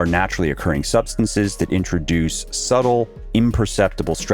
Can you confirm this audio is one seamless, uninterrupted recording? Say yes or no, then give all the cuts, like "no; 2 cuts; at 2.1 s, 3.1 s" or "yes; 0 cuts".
no; 1 cut; at 3.2 s